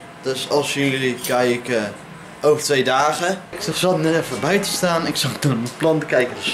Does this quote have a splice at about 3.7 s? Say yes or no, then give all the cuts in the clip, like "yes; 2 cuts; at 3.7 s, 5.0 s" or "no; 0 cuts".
yes; 1 cut; at 3.7 s